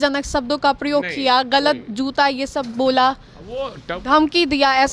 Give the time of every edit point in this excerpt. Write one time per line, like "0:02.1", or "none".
none